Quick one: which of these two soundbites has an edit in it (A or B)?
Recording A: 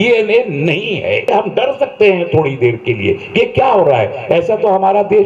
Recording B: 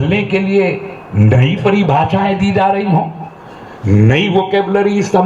A